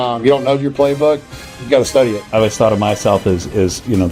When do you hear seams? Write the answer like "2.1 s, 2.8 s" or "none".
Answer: 2.2 s